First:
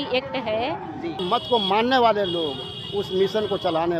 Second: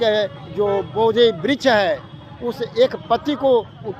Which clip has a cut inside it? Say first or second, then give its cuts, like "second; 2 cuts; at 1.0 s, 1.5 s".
first; 1 cut; at 1.2 s